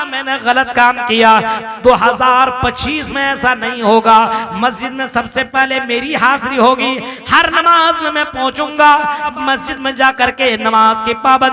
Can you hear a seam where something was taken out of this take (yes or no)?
yes